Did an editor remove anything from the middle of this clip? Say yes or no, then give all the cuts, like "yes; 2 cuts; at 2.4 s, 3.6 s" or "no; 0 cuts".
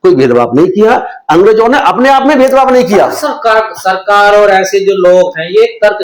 no; 0 cuts